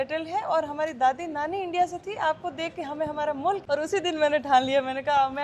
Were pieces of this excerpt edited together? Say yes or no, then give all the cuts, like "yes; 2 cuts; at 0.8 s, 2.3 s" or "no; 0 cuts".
yes; 1 cut; at 3.6 s